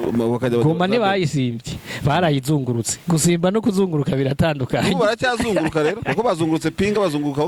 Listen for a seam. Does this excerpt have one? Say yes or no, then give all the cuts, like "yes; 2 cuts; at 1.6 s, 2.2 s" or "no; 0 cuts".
no; 0 cuts